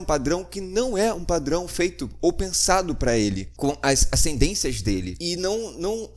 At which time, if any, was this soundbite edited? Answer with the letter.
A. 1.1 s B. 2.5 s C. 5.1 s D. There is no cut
C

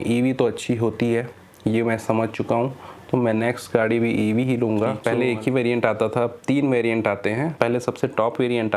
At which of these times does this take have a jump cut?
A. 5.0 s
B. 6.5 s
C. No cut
A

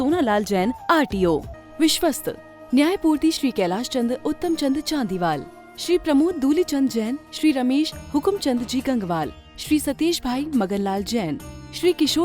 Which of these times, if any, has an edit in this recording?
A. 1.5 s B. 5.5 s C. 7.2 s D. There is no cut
A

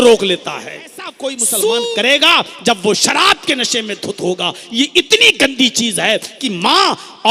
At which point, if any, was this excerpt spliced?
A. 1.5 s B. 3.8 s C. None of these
A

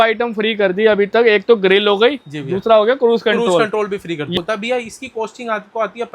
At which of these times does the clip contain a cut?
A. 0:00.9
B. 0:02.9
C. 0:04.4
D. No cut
C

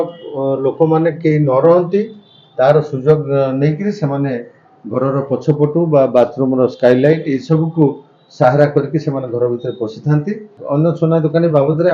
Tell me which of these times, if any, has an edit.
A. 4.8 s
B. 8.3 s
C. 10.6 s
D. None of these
C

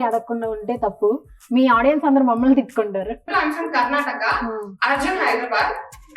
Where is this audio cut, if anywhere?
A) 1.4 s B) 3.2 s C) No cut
B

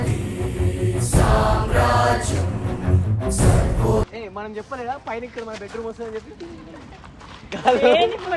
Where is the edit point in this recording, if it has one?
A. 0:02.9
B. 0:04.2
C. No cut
B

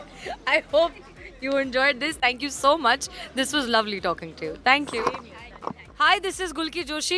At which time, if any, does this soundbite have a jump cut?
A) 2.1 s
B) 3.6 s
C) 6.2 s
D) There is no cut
D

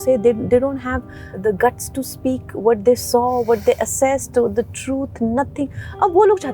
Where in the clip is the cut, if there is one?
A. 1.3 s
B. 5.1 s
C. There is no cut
A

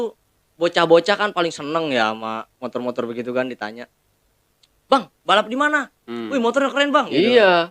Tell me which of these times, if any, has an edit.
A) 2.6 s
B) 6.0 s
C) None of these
C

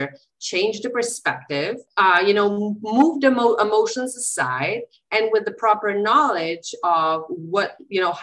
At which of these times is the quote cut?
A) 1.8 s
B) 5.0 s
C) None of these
A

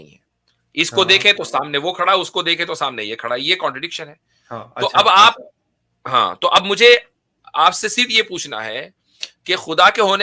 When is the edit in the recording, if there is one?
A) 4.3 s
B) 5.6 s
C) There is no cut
C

